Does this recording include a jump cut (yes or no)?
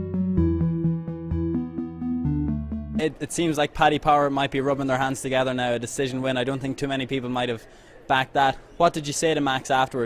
no